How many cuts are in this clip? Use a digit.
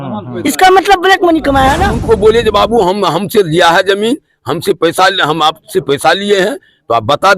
1